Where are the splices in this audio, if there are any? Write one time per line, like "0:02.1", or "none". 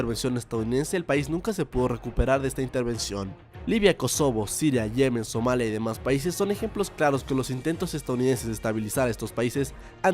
0:06.5